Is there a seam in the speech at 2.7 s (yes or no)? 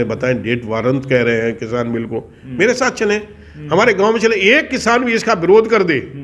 no